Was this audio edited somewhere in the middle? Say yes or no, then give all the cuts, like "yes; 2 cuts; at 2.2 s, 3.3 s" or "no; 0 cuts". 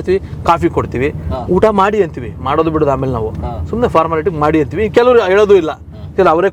no; 0 cuts